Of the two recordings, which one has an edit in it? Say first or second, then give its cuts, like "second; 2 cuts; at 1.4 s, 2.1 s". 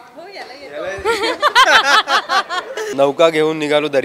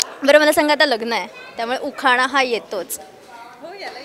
first; 1 cut; at 2.9 s